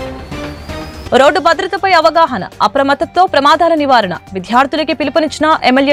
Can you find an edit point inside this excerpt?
no; 0 cuts

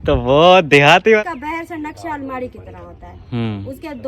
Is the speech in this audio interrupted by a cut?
yes; 1 cut; at 1.2 s

